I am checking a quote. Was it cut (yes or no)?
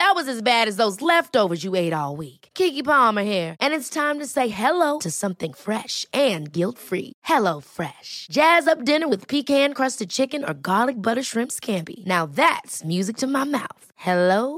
no